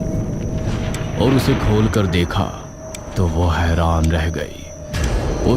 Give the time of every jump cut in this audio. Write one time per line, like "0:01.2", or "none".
0:01.1